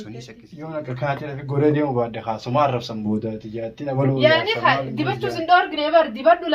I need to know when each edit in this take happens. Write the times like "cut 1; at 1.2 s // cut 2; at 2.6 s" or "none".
none